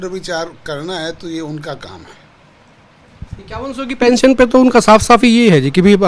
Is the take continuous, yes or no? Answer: yes